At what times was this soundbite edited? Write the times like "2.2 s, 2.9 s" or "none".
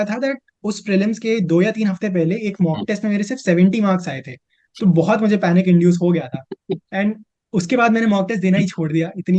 none